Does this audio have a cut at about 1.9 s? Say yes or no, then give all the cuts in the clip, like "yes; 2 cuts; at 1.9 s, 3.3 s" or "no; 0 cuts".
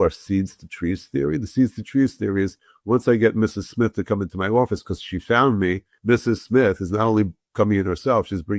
no; 1 cut; at 5.9 s